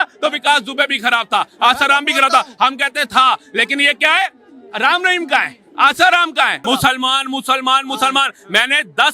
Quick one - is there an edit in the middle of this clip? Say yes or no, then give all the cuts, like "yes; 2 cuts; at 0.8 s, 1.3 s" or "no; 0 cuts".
yes; 1 cut; at 6.6 s